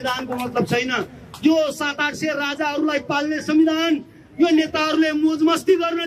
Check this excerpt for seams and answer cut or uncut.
uncut